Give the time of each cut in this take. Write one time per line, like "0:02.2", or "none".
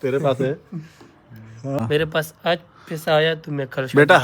0:01.8